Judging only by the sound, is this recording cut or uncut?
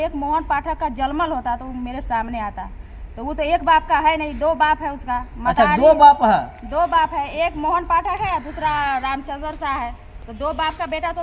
uncut